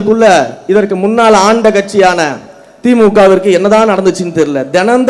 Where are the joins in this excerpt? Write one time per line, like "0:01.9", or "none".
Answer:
none